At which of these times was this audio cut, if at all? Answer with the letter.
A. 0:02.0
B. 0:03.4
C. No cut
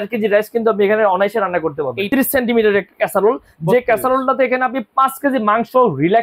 A